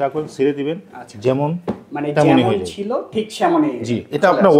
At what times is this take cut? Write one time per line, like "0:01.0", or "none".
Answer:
none